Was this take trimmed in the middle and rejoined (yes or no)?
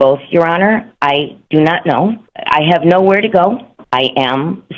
yes